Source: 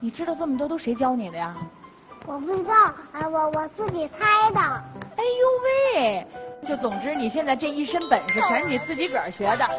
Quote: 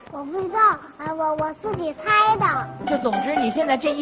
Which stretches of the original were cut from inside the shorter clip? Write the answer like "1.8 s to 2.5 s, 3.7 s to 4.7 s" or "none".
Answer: 4.8 s to 6.5 s